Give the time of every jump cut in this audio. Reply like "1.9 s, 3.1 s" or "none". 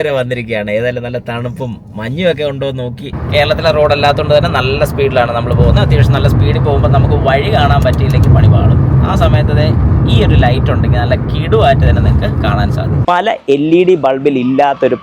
3.2 s, 13.0 s